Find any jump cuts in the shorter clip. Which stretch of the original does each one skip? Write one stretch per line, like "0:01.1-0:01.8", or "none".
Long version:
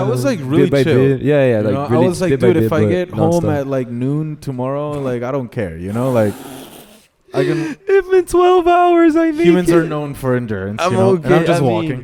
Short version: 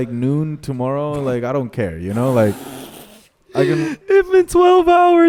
none